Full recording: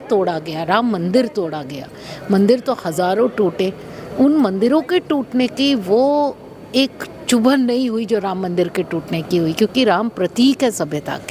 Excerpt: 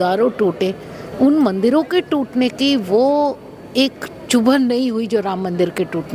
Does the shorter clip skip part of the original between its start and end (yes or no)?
no